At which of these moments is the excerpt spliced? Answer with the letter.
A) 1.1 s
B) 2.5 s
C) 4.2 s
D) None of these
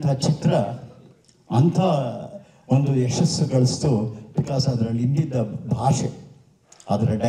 D